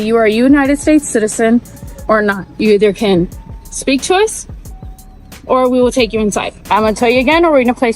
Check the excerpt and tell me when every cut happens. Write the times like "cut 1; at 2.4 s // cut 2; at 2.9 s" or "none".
cut 1; at 2.5 s // cut 2; at 6.6 s